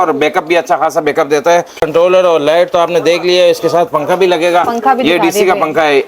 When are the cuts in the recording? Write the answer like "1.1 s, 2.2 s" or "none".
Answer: 1.8 s